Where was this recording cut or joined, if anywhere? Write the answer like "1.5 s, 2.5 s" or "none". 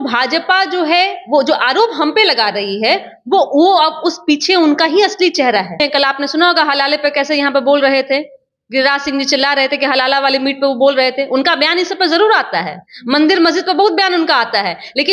5.8 s